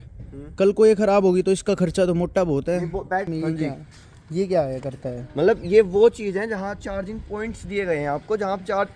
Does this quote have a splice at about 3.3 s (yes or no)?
yes